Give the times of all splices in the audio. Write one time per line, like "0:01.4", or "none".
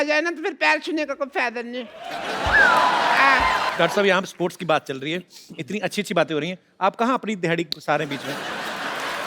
0:03.7